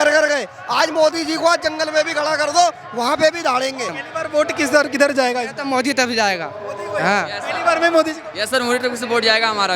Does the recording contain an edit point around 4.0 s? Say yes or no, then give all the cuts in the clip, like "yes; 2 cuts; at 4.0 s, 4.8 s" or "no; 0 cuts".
yes; 1 cut; at 4.0 s